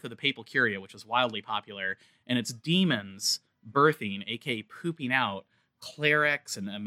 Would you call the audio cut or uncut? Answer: uncut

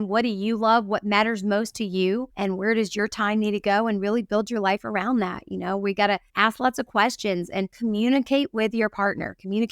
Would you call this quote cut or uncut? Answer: cut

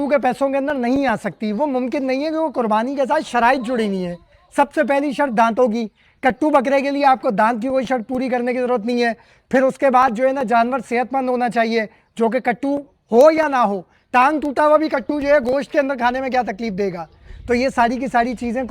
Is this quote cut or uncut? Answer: uncut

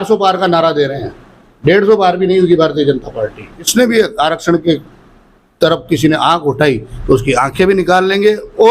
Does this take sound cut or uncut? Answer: cut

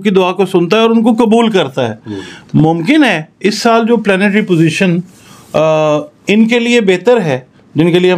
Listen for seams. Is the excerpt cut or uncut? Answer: uncut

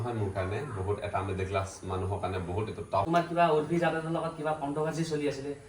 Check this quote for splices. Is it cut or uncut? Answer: cut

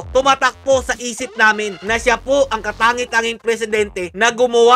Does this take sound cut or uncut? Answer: uncut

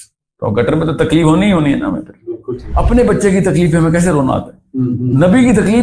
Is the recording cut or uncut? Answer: cut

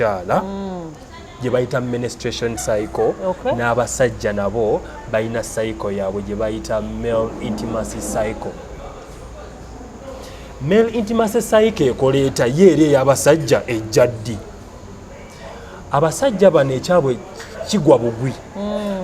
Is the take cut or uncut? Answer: uncut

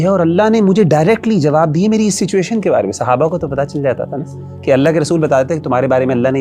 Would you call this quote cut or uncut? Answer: uncut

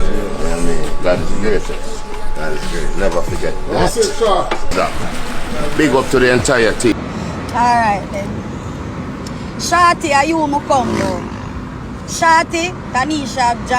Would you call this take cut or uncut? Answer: cut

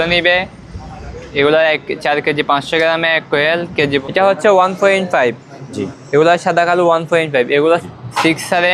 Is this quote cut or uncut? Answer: cut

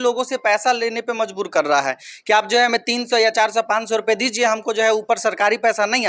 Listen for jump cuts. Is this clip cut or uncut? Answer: uncut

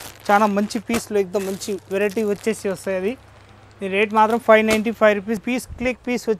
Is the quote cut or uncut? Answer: cut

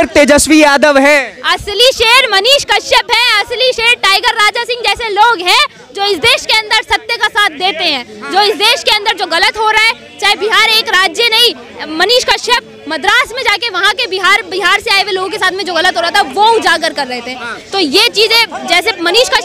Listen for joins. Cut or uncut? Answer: uncut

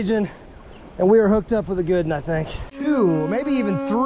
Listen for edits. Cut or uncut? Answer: cut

